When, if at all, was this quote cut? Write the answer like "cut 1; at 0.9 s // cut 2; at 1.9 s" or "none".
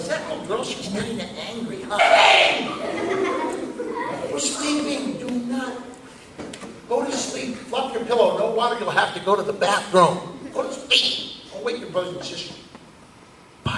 none